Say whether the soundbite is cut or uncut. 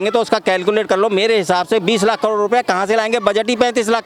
uncut